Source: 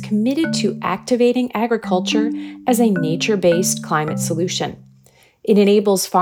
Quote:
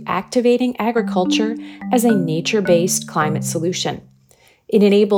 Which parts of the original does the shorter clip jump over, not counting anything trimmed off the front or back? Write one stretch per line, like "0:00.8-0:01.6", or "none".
none